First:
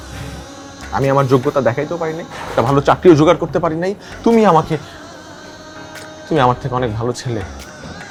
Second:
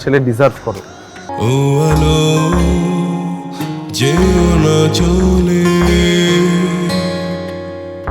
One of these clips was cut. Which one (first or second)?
second